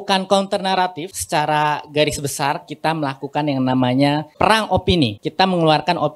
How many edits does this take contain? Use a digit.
3